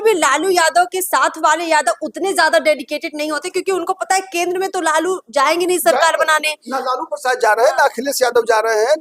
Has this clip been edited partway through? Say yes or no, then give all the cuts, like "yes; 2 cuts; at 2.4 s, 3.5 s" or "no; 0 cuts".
no; 0 cuts